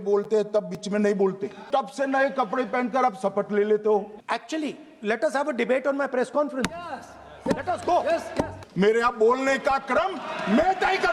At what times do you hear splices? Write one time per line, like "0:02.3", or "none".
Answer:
0:01.6
0:04.2
0:08.6